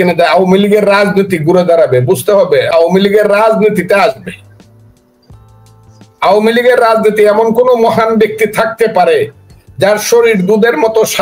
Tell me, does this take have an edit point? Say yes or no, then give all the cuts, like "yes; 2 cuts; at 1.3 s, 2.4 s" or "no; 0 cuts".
yes; 1 cut; at 2.7 s